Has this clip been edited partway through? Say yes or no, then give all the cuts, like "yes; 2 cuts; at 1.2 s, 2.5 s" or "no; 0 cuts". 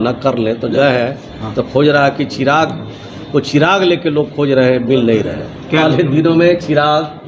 yes; 2 cuts; at 0.7 s, 5.8 s